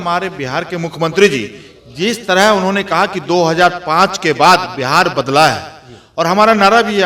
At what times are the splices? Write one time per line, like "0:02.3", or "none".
none